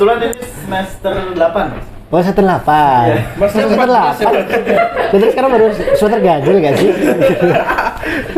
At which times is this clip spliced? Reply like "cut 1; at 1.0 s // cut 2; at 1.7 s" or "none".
none